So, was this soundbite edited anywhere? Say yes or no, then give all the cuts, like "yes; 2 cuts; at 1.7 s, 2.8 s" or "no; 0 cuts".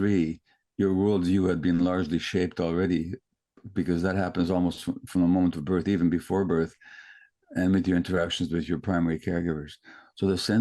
no; 0 cuts